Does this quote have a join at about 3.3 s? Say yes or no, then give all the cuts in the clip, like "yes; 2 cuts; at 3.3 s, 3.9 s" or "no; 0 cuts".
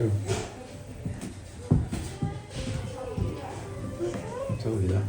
no; 0 cuts